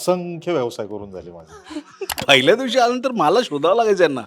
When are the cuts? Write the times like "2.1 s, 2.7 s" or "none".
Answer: 2.2 s